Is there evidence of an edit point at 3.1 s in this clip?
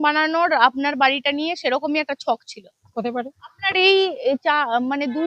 yes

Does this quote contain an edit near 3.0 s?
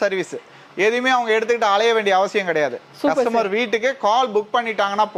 no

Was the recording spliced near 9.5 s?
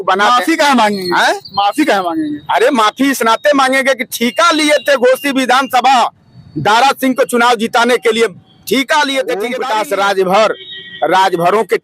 yes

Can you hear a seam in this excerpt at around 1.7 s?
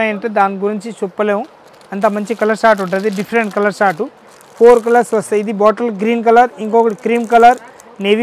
no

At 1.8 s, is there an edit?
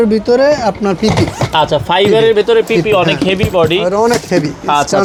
no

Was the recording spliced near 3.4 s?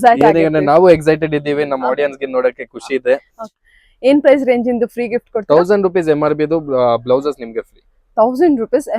yes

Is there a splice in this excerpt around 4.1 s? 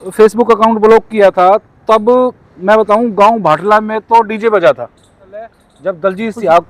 no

